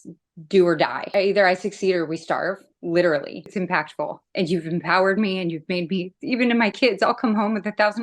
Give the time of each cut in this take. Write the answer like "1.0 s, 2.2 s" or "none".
1.1 s, 3.6 s